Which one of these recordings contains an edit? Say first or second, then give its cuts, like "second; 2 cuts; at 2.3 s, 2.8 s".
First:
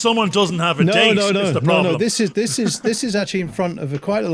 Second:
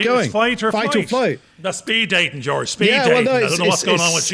second; 1 cut; at 1.5 s